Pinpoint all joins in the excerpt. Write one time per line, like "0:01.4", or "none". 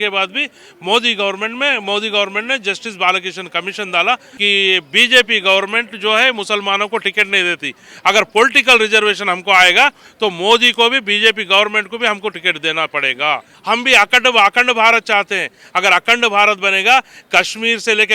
0:04.3
0:13.5